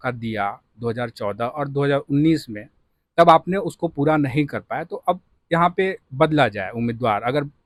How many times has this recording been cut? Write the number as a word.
zero